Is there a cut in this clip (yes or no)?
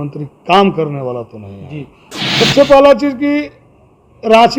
yes